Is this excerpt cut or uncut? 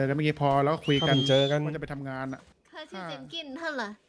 cut